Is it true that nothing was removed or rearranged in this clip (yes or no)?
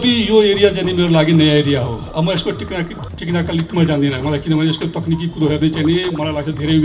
yes